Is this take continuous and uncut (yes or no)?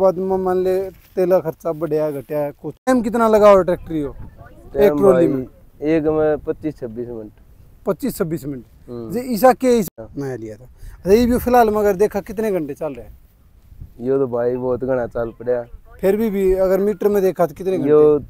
no